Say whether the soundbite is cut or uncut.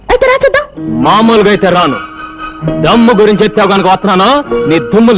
uncut